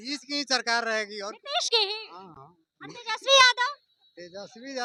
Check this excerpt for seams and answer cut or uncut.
uncut